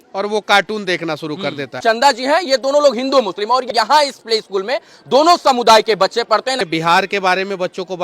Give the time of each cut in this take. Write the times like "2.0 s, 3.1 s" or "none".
1.8 s, 3.7 s, 6.6 s

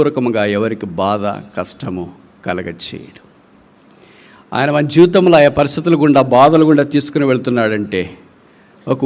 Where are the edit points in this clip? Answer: none

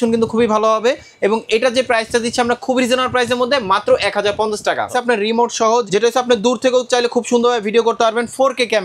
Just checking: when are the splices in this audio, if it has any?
4.9 s, 5.9 s

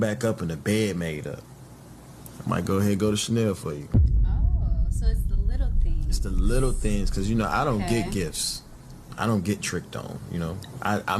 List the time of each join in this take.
7.5 s

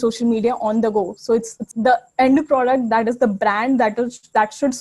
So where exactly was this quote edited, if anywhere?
1.6 s

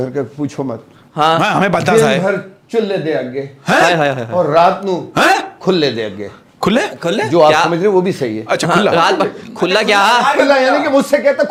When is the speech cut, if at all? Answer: none

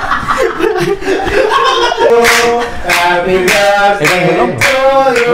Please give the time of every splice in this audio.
2.1 s

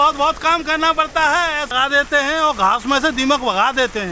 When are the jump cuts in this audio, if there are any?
1.7 s

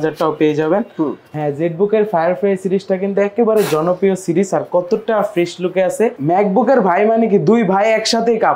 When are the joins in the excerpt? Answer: 1.2 s, 6.2 s

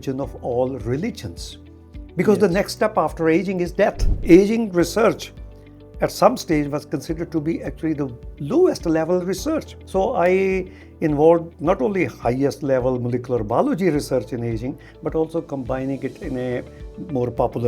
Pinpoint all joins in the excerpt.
4.1 s, 9.8 s

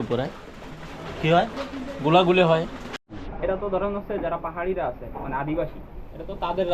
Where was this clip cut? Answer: 2.8 s

